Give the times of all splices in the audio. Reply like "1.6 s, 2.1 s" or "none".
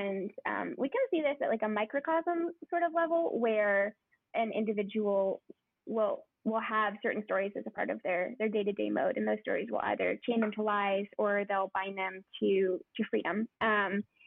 none